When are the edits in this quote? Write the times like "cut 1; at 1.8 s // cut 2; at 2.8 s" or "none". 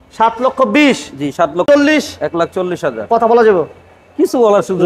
cut 1; at 1.6 s